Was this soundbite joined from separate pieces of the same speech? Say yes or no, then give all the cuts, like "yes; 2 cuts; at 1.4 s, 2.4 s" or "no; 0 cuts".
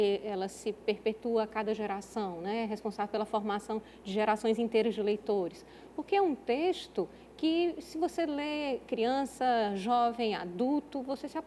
no; 0 cuts